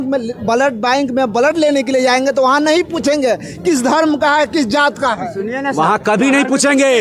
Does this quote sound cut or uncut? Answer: uncut